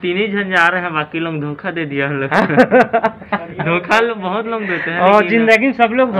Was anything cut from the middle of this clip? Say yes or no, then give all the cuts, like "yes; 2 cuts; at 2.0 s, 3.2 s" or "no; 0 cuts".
no; 0 cuts